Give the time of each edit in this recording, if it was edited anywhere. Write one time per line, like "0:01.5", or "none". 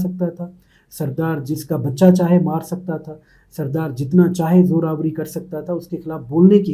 none